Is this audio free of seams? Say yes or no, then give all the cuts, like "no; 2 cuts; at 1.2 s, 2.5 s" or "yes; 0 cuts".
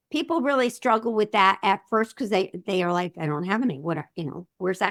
yes; 0 cuts